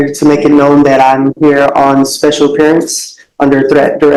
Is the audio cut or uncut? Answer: uncut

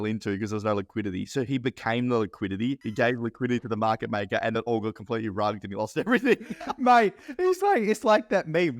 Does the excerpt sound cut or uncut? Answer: cut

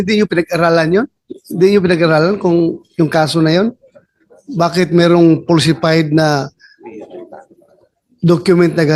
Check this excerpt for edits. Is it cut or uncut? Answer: uncut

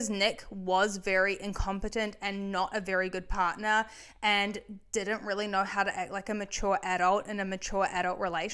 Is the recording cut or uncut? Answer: uncut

